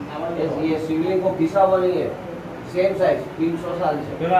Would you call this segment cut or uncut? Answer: uncut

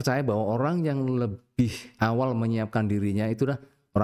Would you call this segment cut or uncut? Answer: uncut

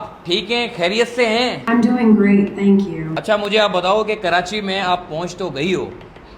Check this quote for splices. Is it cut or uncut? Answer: cut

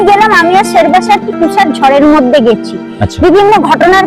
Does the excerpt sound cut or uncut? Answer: uncut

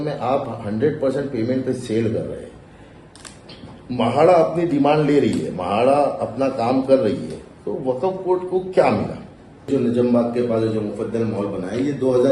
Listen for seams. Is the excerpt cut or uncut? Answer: cut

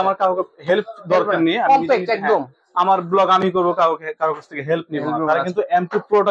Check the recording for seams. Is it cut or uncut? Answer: uncut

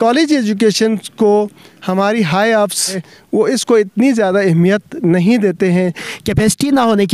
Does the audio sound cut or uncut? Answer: cut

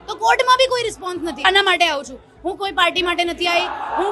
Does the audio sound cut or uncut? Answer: cut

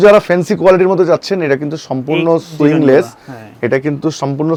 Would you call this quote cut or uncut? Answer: uncut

